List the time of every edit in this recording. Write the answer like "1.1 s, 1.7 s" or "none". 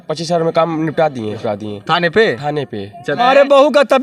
1.4 s, 3.2 s